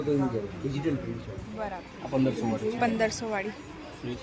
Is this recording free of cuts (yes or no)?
no